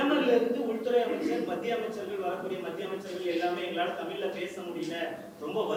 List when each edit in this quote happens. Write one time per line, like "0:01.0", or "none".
none